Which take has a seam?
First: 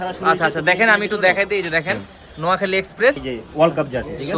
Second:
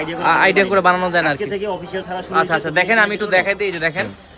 first; 1 cut; at 3.2 s

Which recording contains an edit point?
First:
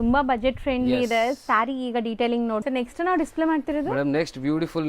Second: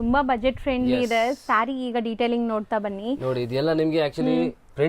first; 1 cut; at 2.6 s

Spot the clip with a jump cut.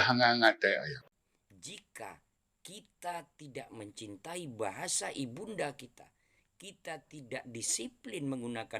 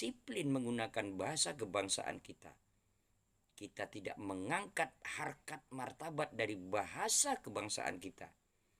first; 1 cut; at 1.0 s

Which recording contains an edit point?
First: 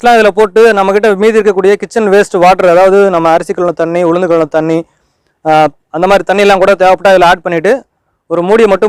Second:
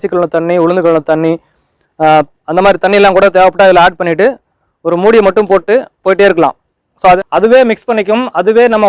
second; 1 cut; at 7.2 s

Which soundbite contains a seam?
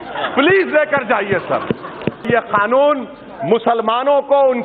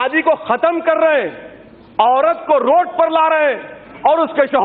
first; 1 cut; at 2.2 s

